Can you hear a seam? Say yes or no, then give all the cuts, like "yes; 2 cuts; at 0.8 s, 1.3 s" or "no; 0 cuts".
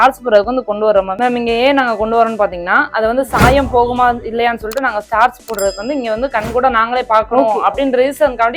no; 0 cuts